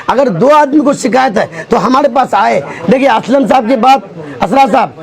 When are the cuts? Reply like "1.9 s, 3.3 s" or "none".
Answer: none